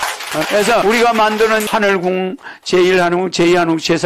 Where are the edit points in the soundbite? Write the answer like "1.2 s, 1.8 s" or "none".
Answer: 0.8 s, 1.7 s